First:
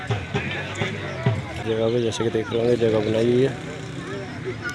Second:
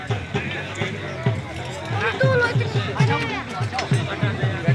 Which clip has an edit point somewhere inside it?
first; 1 cut; at 1.6 s

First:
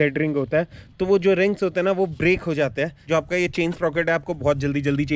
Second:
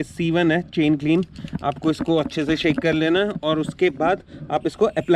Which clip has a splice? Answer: first; 1 cut; at 3.0 s

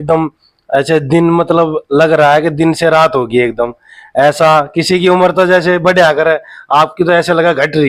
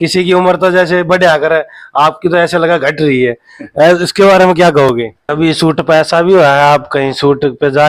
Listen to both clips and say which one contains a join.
second; 1 cut; at 5.2 s

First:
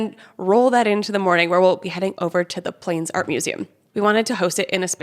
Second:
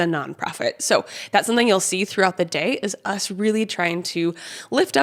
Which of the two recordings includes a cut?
first; 1 cut; at 3.8 s

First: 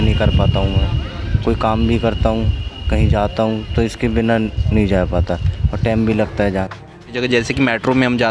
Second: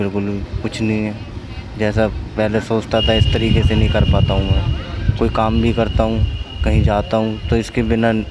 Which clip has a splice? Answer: first; 1 cut; at 7.2 s

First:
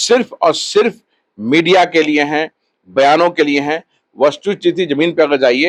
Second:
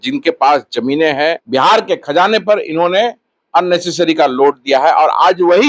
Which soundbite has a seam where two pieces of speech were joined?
second; 1 cut; at 1.4 s

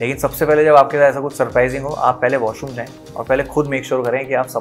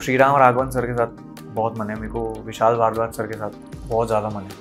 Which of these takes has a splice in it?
second; 1 cut; at 3.7 s

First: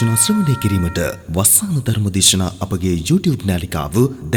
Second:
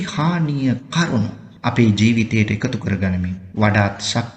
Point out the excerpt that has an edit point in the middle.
second; 2 cuts; at 1.4 s, 3.4 s

